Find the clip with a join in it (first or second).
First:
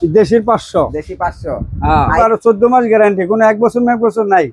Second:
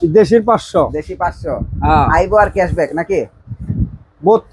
first